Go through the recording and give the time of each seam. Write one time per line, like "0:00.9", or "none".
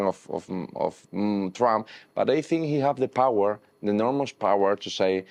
none